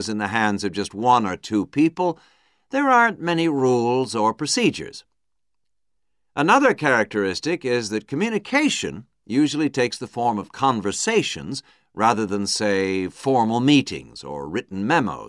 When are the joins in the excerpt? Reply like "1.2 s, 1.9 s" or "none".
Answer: 5.6 s